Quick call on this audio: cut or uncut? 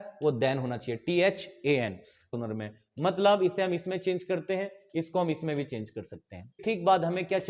cut